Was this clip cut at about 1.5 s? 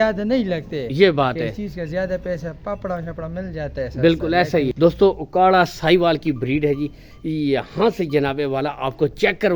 no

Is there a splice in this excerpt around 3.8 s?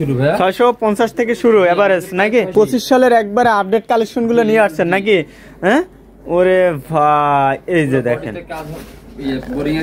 no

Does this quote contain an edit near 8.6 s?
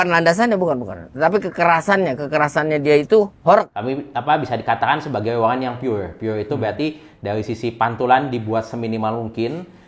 no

